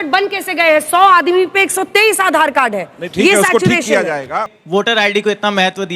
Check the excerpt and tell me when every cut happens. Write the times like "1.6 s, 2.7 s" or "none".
4.6 s